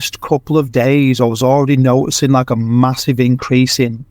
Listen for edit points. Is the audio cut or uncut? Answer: uncut